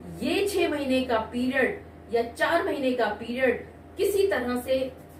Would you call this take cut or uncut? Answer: uncut